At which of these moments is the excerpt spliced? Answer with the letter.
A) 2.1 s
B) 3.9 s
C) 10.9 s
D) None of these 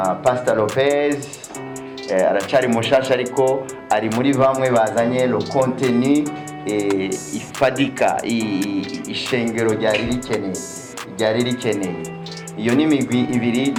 D